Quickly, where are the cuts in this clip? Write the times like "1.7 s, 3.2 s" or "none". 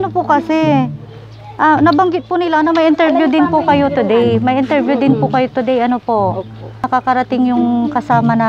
6.9 s

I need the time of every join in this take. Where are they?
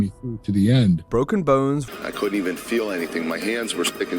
1.6 s

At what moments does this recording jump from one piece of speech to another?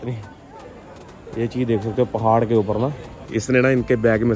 3.1 s

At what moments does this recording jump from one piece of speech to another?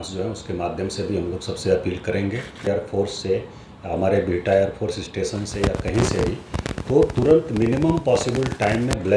2.7 s

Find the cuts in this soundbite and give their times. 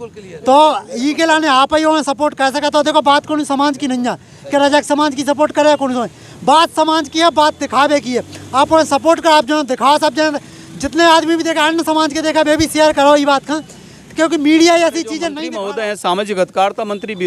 15.3 s

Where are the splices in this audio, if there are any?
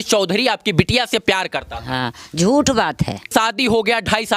3.2 s

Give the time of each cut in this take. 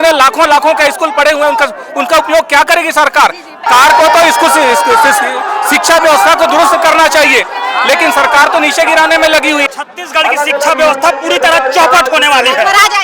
3.7 s, 9.7 s

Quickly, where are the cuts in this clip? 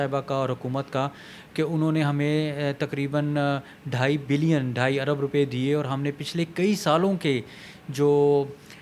none

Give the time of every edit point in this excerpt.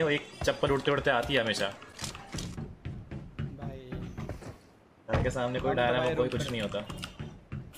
none

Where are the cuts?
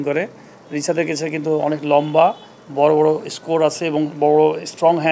none

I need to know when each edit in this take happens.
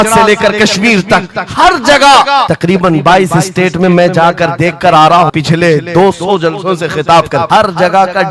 2.5 s, 5.3 s, 7.5 s

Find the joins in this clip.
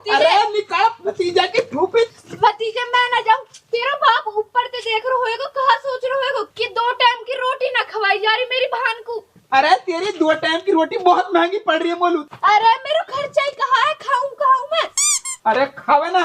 2.1 s

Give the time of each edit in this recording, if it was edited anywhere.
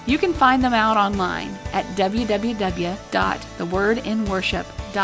3.0 s

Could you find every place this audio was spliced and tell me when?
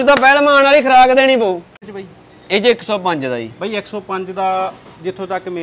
1.8 s

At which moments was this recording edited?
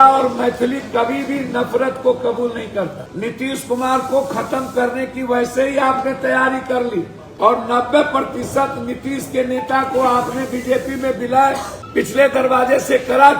3.0 s, 7.2 s, 11.8 s

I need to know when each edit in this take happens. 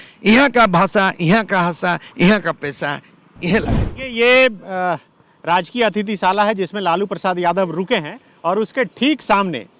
3.9 s

